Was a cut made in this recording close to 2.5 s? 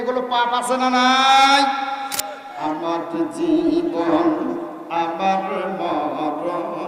yes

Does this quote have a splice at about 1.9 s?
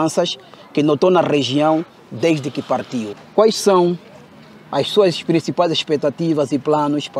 no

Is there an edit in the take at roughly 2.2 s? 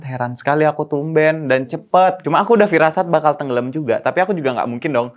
yes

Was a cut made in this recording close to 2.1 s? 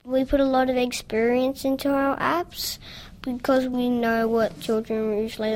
no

